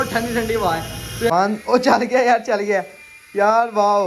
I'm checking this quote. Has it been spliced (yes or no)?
yes